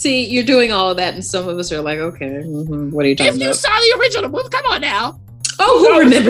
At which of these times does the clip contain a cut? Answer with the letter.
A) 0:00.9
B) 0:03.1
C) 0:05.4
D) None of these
D